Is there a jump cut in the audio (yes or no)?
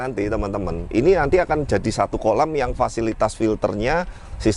no